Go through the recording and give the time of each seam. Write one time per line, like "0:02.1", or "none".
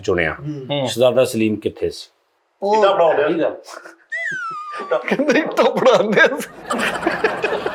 none